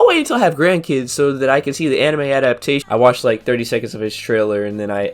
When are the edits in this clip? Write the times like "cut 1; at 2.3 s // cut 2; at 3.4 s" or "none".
cut 1; at 2.8 s